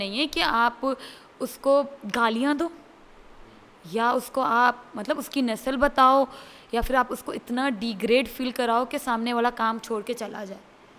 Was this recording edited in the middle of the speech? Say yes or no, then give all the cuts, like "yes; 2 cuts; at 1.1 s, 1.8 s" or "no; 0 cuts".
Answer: no; 0 cuts